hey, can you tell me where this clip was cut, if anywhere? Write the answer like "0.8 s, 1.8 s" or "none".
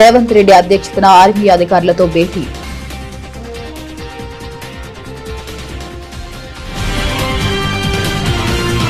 none